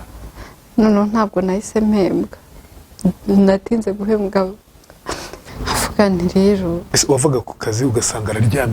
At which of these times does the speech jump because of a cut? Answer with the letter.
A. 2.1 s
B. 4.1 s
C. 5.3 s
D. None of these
C